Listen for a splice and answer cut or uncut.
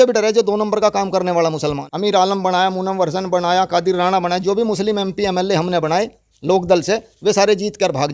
cut